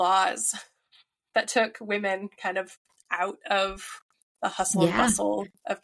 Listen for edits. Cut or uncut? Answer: uncut